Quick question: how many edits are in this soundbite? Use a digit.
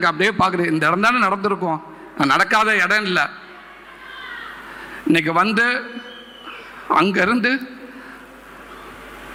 0